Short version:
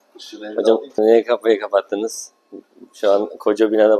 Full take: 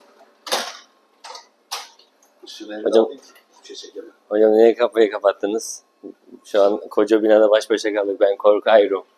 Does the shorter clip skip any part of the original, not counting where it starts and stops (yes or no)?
yes